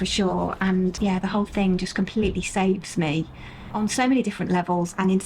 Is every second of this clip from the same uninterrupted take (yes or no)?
yes